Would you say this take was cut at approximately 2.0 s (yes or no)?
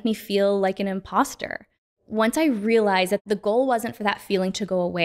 yes